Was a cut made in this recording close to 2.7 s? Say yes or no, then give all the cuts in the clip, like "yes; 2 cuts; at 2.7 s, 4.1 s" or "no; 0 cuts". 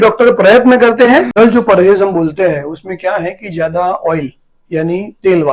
no; 1 cut; at 1.3 s